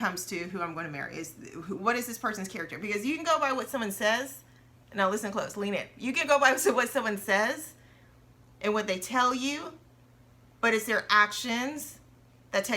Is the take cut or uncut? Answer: uncut